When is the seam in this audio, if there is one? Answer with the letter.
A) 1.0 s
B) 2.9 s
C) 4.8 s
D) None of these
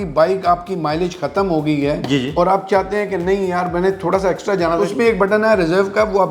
C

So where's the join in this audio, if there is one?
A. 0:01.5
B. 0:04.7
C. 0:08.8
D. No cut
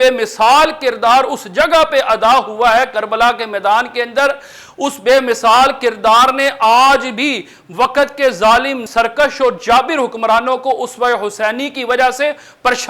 C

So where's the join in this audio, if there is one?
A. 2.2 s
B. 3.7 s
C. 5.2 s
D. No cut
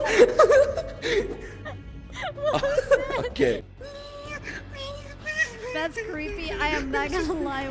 B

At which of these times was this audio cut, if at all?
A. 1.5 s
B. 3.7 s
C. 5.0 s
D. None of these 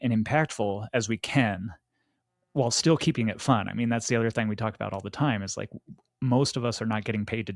D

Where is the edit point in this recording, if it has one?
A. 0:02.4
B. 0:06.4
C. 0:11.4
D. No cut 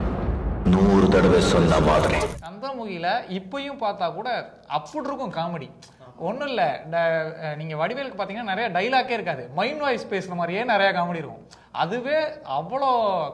A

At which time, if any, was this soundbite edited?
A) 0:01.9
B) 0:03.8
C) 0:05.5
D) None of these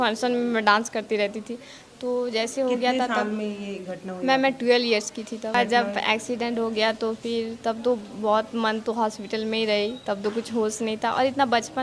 C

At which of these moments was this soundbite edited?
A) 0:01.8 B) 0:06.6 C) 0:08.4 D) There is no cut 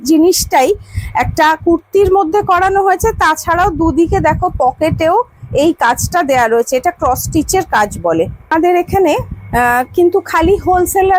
C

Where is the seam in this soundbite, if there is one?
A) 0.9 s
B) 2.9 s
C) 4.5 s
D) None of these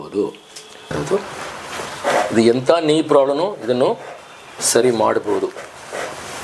A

